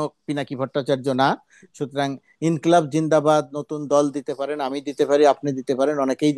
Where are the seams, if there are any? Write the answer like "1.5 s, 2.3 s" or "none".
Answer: none